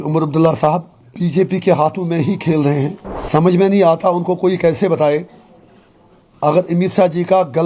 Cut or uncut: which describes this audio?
cut